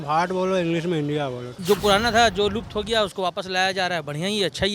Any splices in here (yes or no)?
yes